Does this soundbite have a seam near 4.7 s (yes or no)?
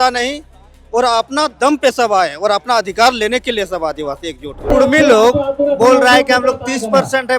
yes